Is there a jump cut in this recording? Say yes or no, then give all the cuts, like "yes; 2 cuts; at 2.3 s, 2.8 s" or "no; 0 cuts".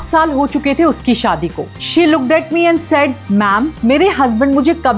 yes; 1 cut; at 1.7 s